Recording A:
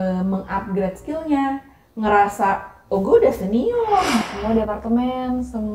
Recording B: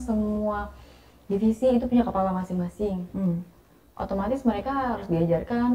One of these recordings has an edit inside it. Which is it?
A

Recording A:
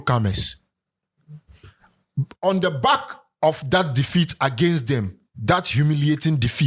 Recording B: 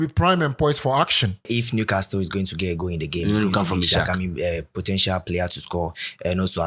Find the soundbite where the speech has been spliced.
B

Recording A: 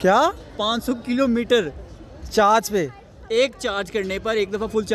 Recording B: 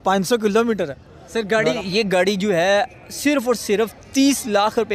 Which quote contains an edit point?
B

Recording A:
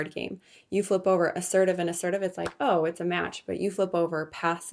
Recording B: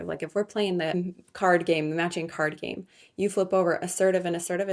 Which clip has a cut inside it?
B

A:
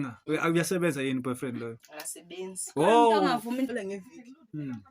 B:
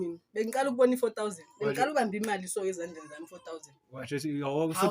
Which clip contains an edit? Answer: A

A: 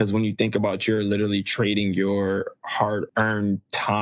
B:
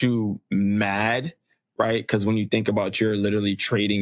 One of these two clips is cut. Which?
A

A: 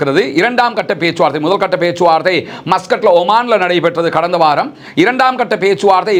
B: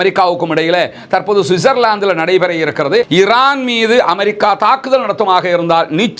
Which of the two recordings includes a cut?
B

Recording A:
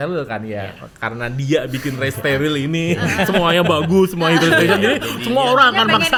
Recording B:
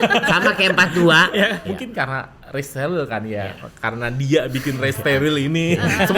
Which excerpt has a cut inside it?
B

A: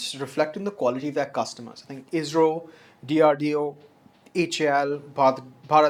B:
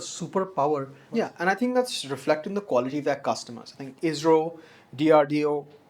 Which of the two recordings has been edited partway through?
B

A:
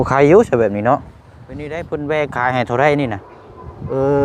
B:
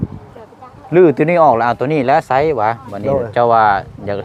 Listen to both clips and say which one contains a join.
A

